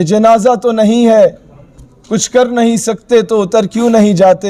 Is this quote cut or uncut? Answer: uncut